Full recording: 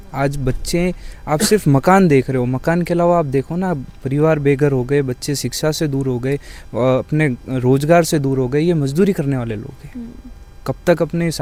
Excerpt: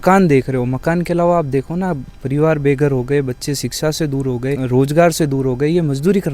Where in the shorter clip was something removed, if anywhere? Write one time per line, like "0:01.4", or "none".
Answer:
0:04.6